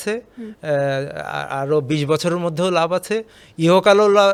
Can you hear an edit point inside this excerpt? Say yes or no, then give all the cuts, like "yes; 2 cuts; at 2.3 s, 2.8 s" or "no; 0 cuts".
no; 0 cuts